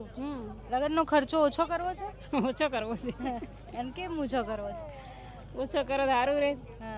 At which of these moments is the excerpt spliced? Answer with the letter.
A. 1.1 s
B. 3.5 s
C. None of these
C